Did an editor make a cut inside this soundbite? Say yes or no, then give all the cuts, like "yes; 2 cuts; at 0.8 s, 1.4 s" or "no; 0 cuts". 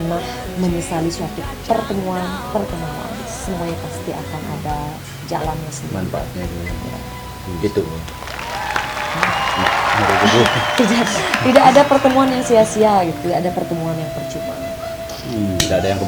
no; 0 cuts